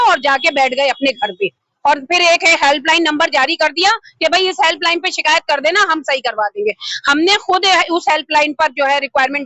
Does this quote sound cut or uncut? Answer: uncut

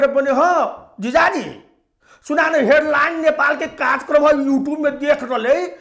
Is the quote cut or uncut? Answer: uncut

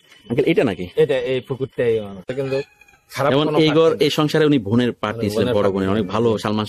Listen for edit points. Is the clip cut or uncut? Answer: cut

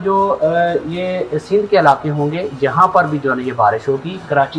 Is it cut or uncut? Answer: uncut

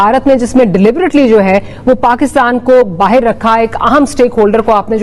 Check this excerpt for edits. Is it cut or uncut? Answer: uncut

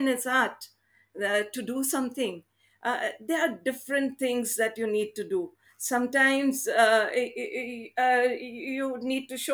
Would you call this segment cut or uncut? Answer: uncut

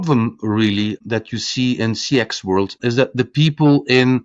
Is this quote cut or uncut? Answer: cut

